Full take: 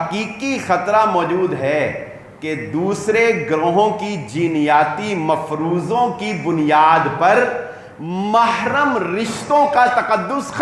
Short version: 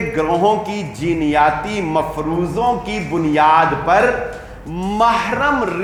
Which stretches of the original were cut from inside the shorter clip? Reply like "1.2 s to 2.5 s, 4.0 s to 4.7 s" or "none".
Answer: none